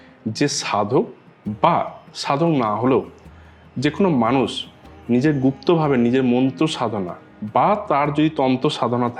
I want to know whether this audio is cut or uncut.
uncut